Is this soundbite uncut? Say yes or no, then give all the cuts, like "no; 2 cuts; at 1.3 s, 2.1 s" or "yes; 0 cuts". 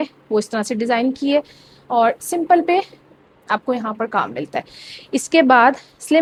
yes; 0 cuts